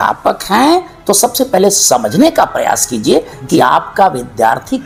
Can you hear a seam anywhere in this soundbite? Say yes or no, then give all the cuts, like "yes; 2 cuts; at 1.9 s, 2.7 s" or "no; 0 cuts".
no; 0 cuts